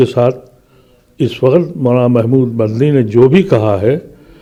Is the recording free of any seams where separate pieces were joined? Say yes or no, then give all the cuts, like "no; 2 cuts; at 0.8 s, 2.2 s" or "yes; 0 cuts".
yes; 0 cuts